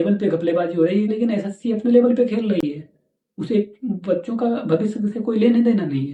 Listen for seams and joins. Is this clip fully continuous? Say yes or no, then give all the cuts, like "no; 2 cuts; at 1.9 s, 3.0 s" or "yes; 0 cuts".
yes; 0 cuts